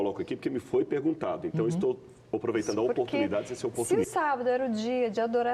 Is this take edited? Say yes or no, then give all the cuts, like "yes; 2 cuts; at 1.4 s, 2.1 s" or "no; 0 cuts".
yes; 1 cut; at 3.9 s